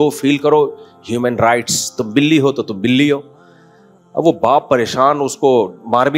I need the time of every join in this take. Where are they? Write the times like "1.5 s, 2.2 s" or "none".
none